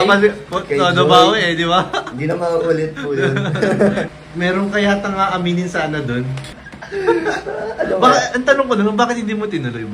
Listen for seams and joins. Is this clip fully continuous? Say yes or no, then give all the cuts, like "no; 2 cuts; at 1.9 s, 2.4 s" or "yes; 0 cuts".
no; 2 cuts; at 4.1 s, 6.4 s